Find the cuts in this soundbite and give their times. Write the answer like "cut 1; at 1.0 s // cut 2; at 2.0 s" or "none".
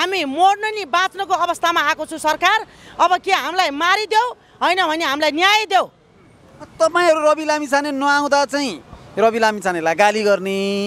none